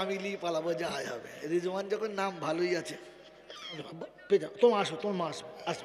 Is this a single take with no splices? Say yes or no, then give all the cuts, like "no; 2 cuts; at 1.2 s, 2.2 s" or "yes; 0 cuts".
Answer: no; 1 cut; at 3.9 s